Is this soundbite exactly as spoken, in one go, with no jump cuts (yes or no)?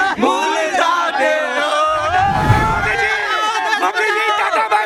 yes